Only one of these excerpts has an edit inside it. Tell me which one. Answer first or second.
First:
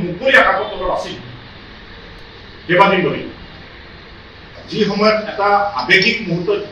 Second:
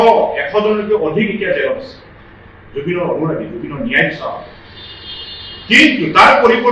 first